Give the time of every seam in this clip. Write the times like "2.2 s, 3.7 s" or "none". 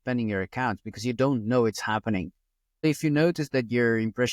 2.8 s

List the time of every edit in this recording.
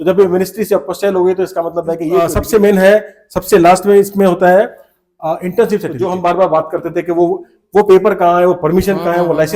2.2 s, 5.9 s

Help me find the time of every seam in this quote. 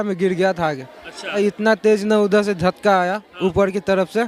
1.4 s

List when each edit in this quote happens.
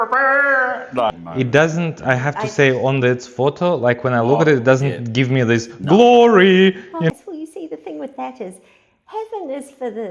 1.1 s, 7.1 s

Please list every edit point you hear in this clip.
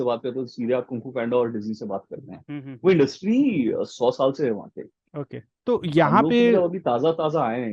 none

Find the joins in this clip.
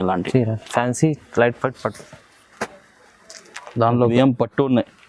4.1 s

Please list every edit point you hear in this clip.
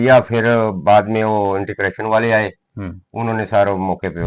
none

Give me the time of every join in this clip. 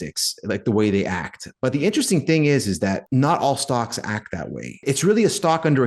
3.0 s, 4.8 s

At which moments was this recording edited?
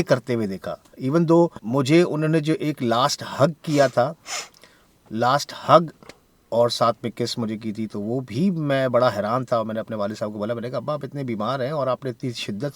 0.9 s, 1.6 s

